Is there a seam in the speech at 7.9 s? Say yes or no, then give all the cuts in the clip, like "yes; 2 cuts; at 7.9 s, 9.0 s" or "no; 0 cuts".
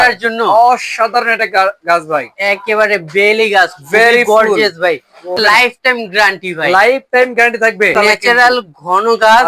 yes; 2 cuts; at 5.4 s, 7.9 s